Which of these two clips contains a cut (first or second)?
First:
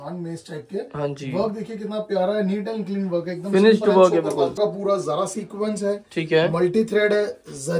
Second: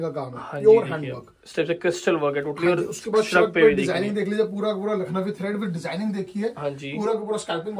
first